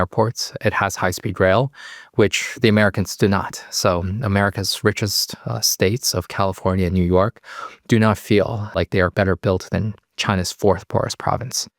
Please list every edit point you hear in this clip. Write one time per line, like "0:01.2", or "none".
0:09.0